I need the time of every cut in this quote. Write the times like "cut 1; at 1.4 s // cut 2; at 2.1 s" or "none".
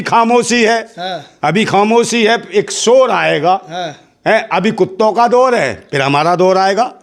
none